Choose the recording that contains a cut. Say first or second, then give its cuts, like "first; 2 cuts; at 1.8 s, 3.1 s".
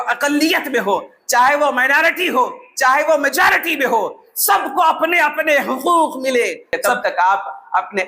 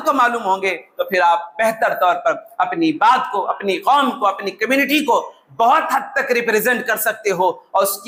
first; 1 cut; at 6.8 s